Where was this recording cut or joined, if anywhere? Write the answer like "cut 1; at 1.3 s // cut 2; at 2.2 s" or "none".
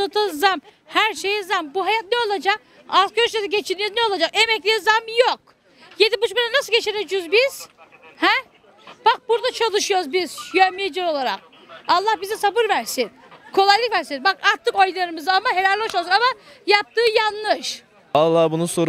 cut 1; at 18.0 s